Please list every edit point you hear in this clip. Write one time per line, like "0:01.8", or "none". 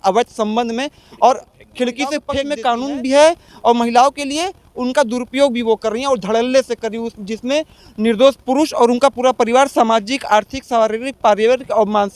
0:02.4

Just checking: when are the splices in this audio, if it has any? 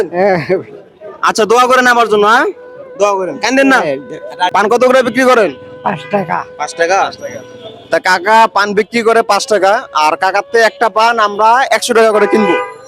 0:04.5

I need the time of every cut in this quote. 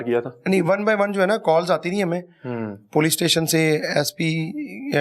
none

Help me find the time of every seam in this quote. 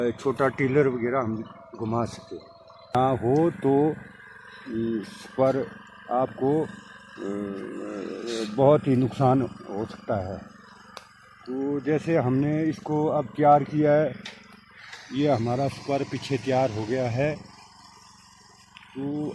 0:02.9

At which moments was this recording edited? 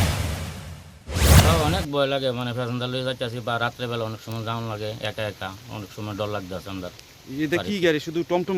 0:01.5

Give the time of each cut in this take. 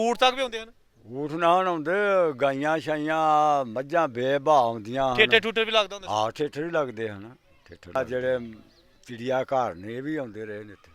0:05.2
0:08.0

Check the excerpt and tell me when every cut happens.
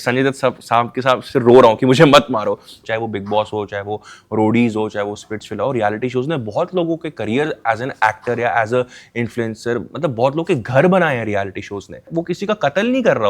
0:02.7
0:12.1

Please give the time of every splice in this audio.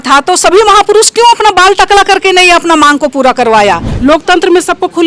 0:03.9

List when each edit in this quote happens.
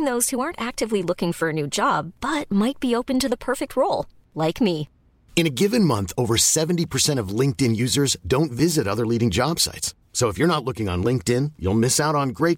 none

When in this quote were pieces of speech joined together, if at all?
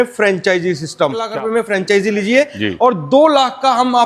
0:01.3

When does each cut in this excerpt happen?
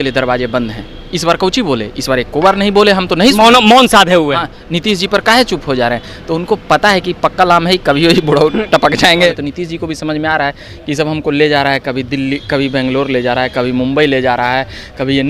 0:09.3

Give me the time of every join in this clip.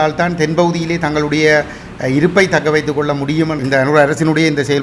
0:03.6

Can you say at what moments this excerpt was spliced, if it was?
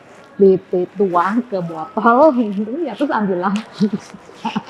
none

